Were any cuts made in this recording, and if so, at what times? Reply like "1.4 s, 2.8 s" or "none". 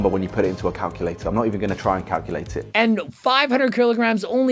2.6 s